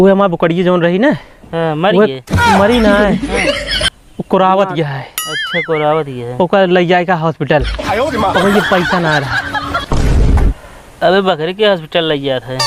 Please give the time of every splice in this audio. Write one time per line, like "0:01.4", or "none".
none